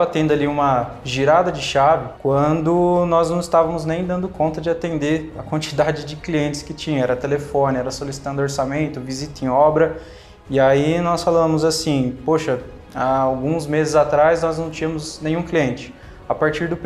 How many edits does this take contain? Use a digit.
1